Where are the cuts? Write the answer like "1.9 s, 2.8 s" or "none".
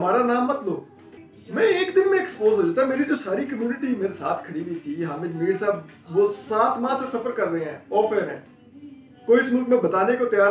1.2 s